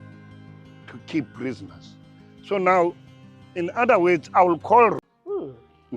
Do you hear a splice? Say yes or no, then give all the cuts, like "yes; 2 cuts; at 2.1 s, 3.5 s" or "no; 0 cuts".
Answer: yes; 1 cut; at 5.0 s